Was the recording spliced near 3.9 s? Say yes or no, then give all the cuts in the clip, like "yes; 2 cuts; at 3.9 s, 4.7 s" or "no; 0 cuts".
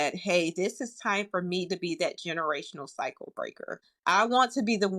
yes; 1 cut; at 3.9 s